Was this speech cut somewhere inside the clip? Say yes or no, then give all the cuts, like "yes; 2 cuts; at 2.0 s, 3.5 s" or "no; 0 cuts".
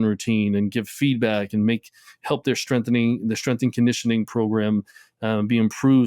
no; 0 cuts